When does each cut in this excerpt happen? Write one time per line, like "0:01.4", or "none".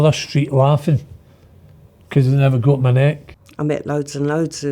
0:03.4